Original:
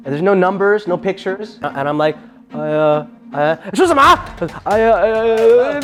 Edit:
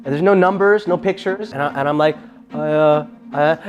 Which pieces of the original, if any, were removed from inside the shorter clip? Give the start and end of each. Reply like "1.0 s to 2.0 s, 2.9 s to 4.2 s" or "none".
none

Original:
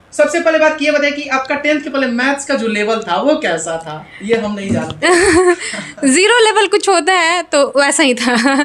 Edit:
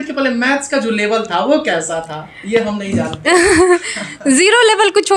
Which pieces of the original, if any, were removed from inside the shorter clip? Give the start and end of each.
none

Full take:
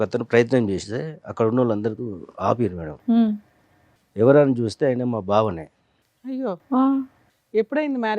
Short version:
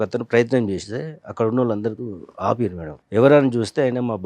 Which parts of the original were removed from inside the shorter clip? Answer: 2.9 s to 3.9 s

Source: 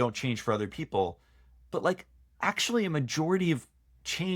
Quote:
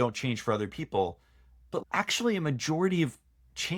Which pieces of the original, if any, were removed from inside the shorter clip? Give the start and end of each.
1.8 s to 2.3 s

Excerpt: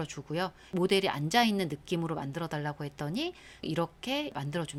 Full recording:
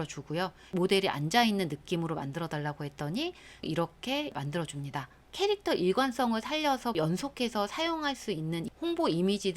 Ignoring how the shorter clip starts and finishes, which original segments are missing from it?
none

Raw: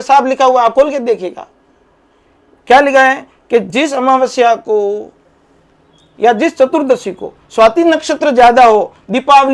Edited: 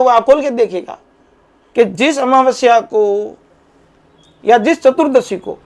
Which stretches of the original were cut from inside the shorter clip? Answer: 2.1 s to 3.3 s

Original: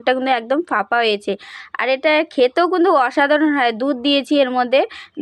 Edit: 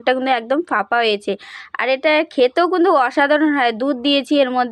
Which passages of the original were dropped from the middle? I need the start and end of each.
none

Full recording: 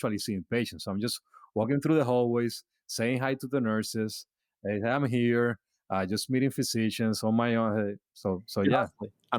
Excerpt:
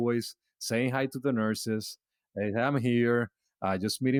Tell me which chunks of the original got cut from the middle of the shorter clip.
none

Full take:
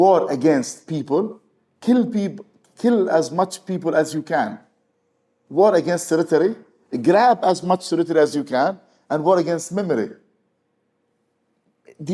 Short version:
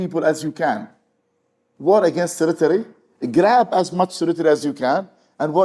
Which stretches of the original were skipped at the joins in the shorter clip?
none

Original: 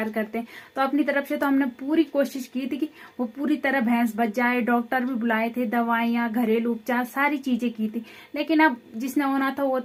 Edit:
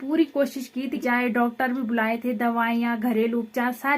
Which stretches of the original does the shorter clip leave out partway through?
2.8 s to 4.3 s

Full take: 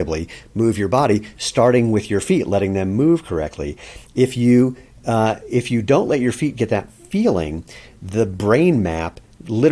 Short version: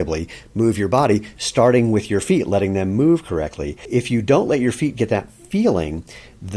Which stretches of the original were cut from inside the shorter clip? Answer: 3.8 s to 5.4 s

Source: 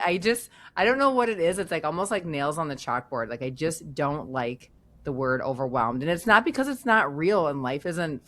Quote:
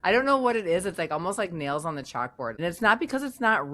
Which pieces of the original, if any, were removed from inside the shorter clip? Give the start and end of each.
3.3 s to 6.0 s

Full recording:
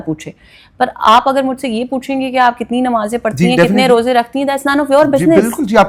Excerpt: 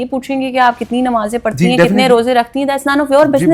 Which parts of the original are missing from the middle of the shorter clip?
none

